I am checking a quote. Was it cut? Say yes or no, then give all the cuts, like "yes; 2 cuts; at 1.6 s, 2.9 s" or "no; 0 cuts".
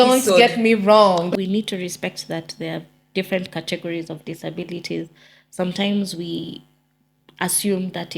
yes; 1 cut; at 1.3 s